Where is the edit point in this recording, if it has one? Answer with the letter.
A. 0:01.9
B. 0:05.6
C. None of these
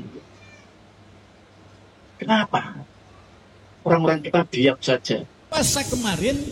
B